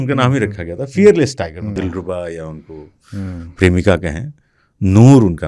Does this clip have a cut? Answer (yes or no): yes